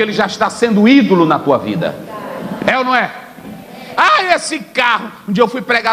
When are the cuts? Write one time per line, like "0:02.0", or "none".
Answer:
none